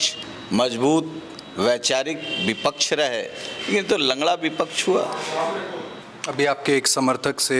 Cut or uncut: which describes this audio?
uncut